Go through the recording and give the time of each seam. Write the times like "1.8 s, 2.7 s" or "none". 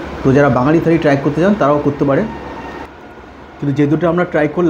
none

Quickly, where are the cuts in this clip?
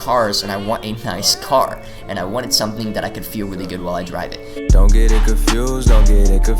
4.4 s

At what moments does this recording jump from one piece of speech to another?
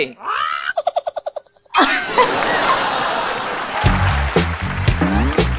3.7 s

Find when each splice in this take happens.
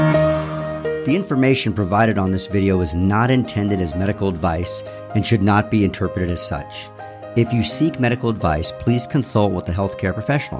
1.0 s

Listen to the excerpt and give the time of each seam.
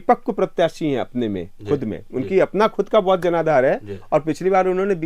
none

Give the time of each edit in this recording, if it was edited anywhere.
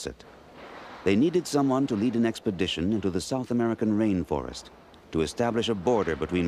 5.5 s

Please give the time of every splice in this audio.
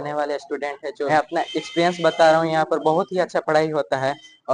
1.1 s

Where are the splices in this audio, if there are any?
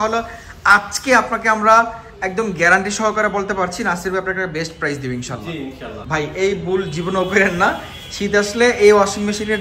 5.9 s

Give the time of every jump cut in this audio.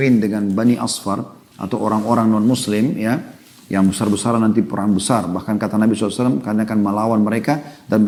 none

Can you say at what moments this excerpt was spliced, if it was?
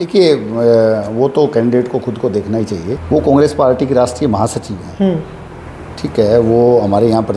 2.9 s

